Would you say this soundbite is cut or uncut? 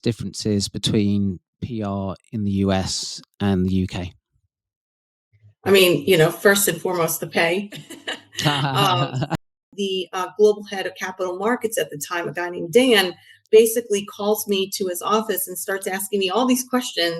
cut